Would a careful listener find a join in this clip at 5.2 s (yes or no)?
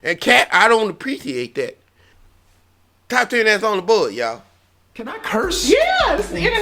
yes